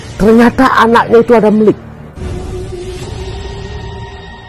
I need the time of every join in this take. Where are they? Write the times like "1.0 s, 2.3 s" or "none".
2.0 s, 3.2 s